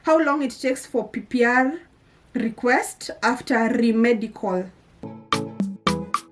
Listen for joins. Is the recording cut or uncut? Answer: cut